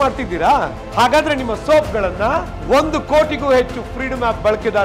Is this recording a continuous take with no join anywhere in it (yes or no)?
yes